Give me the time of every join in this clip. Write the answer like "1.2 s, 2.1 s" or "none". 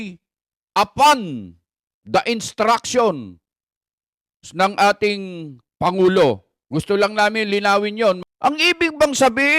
8.2 s